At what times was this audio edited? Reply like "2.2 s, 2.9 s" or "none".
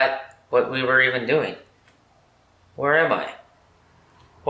none